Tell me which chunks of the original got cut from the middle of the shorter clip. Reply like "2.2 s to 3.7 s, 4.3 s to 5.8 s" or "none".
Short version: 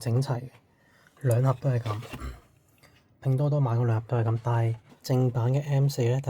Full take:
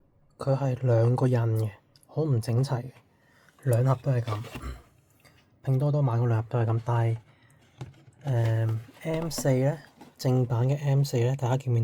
7.3 s to 10.0 s